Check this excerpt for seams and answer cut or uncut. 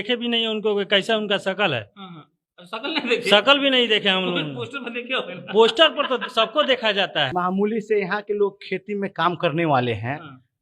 cut